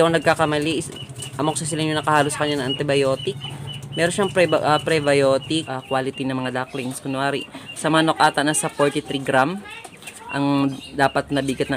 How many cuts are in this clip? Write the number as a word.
one